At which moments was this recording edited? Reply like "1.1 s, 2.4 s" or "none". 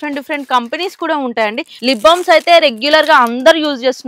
1.7 s